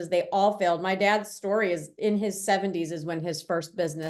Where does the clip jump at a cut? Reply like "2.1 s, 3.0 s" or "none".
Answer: none